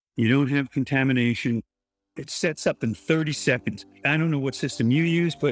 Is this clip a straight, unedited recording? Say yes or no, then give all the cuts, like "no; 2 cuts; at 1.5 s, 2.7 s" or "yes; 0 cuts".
no; 2 cuts; at 2.1 s, 3.9 s